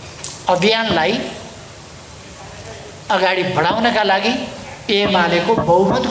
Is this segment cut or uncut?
uncut